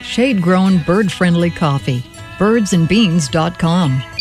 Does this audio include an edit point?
no; 0 cuts

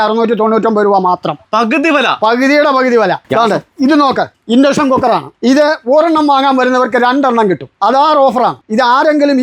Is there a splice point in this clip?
yes; 2 cuts; at 1.4 s, 3.2 s

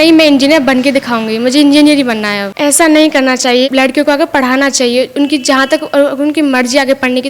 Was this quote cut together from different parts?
yes; 2 cuts; at 2.4 s, 3.7 s

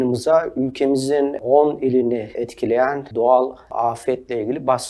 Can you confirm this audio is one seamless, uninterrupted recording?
no; 3 cuts; at 1.4 s, 2.6 s, 3.7 s

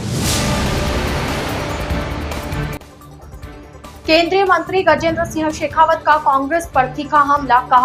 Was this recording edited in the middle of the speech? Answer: yes; 1 cut; at 2.6 s

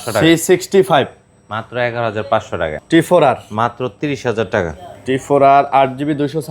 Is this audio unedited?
no; 1 cut; at 2.8 s

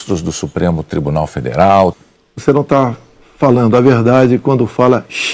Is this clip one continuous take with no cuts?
no; 1 cut; at 1.9 s

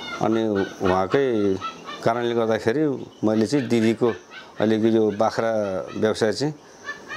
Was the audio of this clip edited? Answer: no; 0 cuts

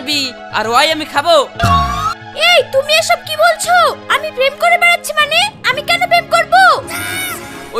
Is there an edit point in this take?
no; 0 cuts

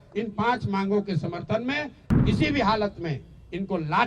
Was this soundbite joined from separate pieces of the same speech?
yes; 1 cut; at 2.2 s

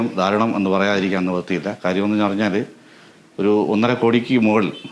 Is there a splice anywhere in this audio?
no; 0 cuts

